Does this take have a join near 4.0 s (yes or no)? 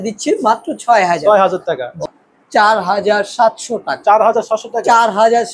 no